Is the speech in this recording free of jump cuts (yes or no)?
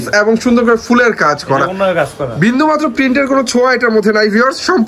yes